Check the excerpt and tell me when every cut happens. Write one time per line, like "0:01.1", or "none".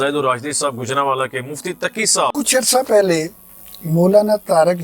0:02.3